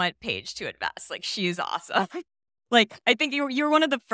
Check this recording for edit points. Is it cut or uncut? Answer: uncut